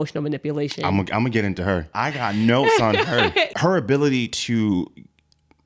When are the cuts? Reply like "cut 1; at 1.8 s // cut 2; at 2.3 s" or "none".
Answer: cut 1; at 1.9 s // cut 2; at 3.5 s